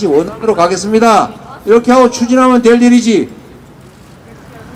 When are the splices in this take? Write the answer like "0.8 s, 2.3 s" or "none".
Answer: none